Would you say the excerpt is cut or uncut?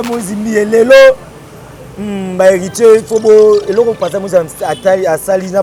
uncut